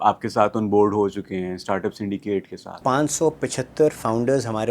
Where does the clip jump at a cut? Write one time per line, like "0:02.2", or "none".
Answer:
0:02.6